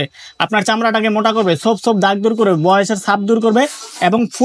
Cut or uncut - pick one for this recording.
uncut